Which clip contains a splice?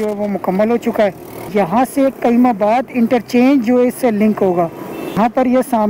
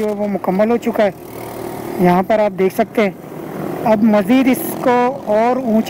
first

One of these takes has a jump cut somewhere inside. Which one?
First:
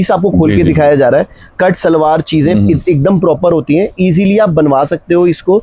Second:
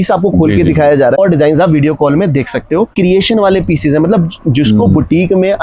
second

